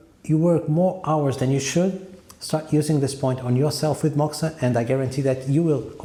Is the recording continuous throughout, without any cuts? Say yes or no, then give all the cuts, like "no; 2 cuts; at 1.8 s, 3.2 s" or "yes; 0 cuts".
yes; 0 cuts